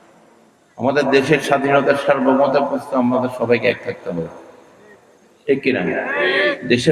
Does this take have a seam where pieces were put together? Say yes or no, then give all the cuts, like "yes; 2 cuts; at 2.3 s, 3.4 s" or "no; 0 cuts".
no; 0 cuts